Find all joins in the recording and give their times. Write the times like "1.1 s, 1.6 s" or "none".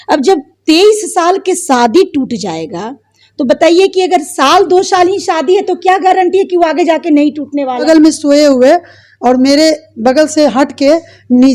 7.8 s

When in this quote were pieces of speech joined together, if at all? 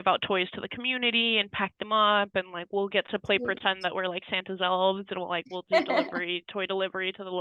none

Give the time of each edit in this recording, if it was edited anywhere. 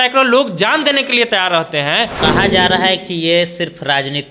2.1 s

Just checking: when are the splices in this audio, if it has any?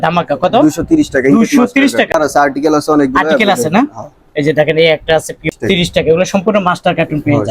2.1 s, 5.5 s

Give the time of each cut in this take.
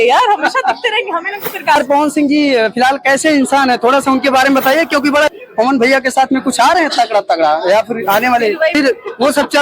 1.8 s, 5.3 s, 8.8 s

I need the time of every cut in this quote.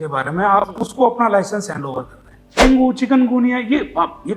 2.6 s

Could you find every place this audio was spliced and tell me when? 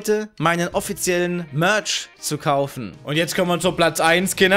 2.9 s

